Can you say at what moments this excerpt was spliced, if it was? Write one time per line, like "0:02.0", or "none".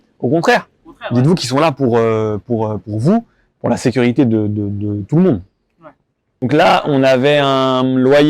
0:06.5